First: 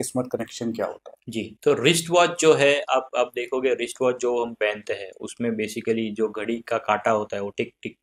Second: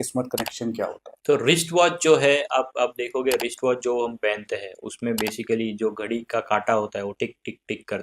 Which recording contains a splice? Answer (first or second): second